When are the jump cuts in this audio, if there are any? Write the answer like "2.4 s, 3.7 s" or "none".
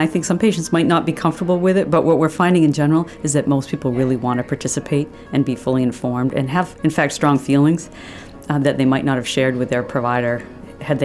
none